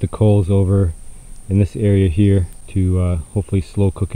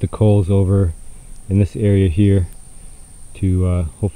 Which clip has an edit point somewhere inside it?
first; 1 cut; at 2.6 s

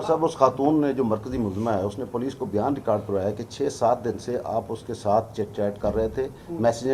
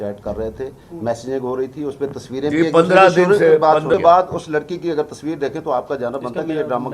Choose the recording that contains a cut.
second; 1 cut; at 3.9 s

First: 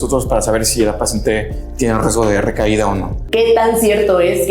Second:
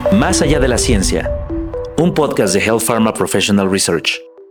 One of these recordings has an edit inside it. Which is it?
first; 1 cut; at 3.1 s

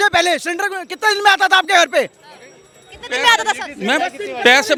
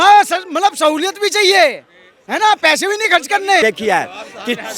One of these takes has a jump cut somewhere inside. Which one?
second; 1 cut; at 3.6 s

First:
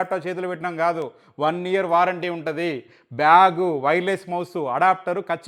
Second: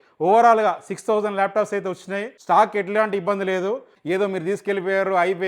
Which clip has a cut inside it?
second; 2 cuts; at 2.3 s, 3.9 s

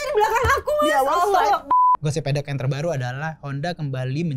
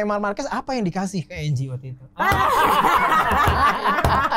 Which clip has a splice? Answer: first; 1 cut; at 1.7 s

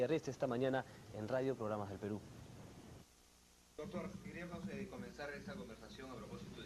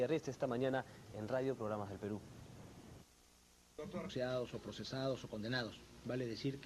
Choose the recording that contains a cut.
first; 1 cut; at 4.1 s

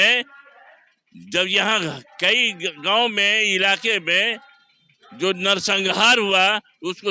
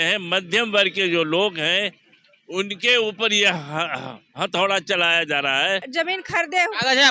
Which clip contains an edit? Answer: second; 1 cut; at 5.9 s

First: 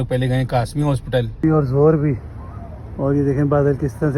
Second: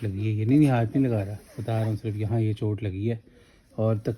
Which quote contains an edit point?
first; 1 cut; at 1.4 s

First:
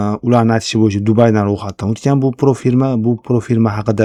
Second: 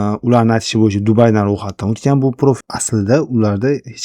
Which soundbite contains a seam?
second; 1 cut; at 2.6 s

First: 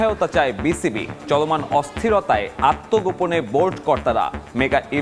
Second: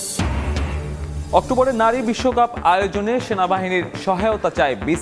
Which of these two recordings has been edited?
second; 1 cut; at 1.1 s

